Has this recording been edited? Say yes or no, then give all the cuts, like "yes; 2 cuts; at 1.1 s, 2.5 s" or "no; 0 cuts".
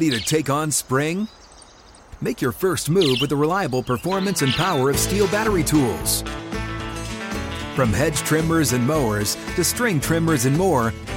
no; 0 cuts